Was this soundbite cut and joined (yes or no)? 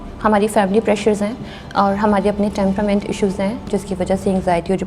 yes